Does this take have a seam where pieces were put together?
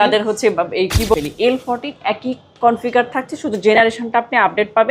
yes; 1 cut; at 1.1 s

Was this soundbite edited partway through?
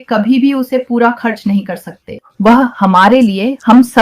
yes; 1 cut; at 2.3 s

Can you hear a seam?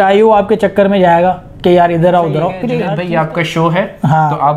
yes; 1 cut; at 2.7 s

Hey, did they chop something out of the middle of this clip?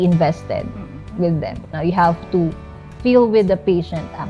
yes; 1 cut; at 1.6 s

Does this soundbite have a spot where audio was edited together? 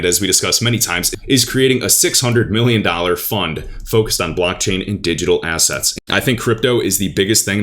yes; 1 cut; at 5.8 s

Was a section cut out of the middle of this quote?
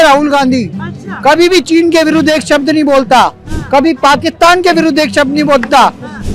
no; 0 cuts

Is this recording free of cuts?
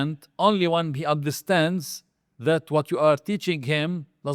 yes; 0 cuts

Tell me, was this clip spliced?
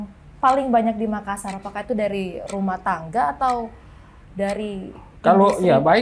no; 0 cuts

